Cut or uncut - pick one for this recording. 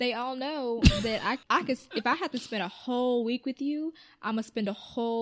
cut